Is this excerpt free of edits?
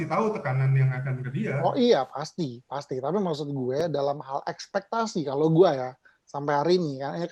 yes; 0 cuts

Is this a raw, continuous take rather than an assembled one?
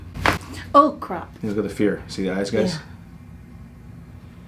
no; 1 cut; at 1.3 s

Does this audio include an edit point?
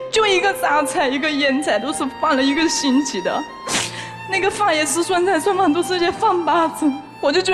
no; 0 cuts

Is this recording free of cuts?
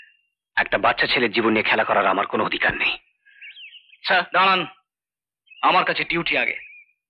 yes; 0 cuts

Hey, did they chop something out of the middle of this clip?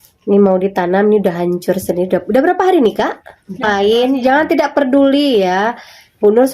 yes; 1 cut; at 3.6 s

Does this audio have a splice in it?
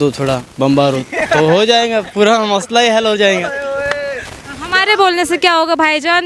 no; 0 cuts

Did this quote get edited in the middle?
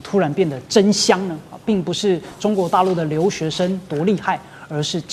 no; 0 cuts

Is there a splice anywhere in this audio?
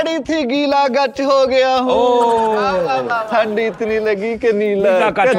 no; 0 cuts

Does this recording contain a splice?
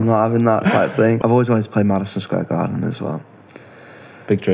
yes; 1 cut; at 1.2 s

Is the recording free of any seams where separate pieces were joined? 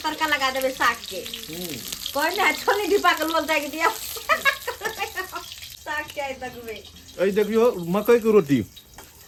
yes; 0 cuts

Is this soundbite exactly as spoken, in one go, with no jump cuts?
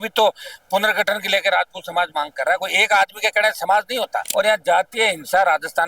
no; 1 cut; at 4.3 s

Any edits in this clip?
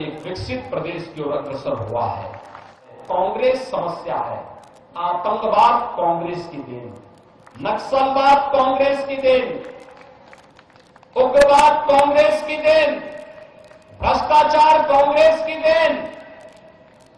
yes; 1 cut; at 2.9 s

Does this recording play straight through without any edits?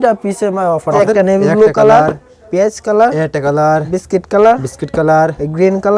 no; 1 cut; at 1.0 s

